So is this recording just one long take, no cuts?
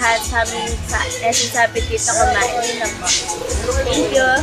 yes; 0 cuts

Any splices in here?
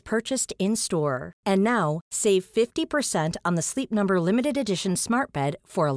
no; 0 cuts

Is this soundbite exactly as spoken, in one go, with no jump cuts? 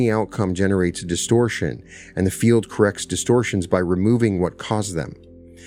yes; 0 cuts

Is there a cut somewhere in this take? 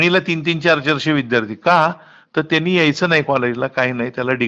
no; 0 cuts

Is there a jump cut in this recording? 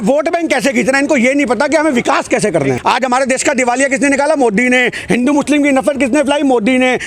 yes; 1 cut; at 2.8 s

